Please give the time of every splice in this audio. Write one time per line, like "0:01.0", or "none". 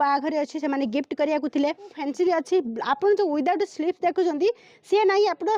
0:02.0